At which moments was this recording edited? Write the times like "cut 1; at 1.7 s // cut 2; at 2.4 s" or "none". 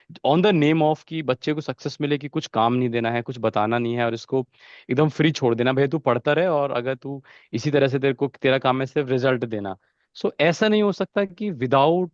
none